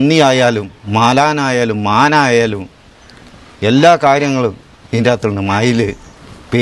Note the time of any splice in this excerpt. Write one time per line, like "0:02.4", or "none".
none

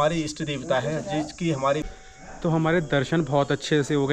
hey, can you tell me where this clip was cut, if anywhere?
0:01.9

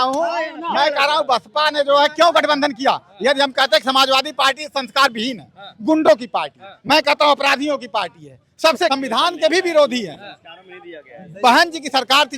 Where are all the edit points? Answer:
0:08.9

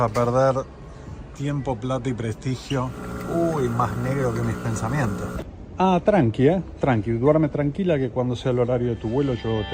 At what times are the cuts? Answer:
0:03.0
0:05.5

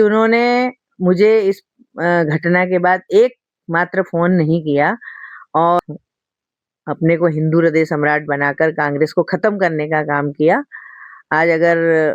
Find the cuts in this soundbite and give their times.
0:05.8

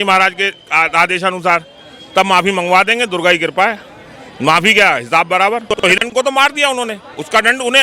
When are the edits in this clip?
0:06.1

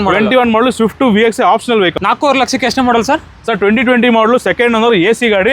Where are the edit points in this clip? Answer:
0:02.0

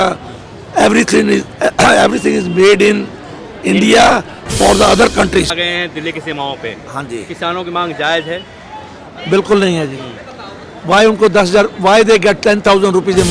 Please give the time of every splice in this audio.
0:05.6

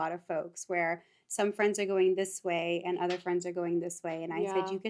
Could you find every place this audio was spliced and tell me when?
none

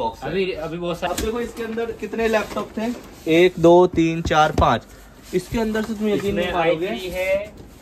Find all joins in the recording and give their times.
0:01.1

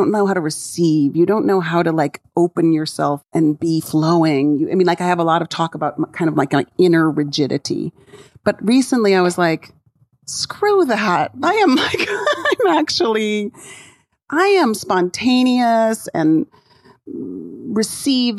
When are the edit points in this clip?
0:03.2

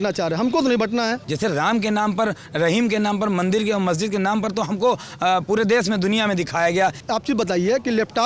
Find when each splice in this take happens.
0:01.2
0:07.0

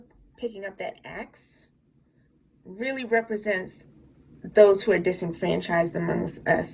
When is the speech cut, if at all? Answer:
none

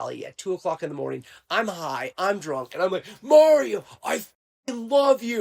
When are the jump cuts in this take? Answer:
none

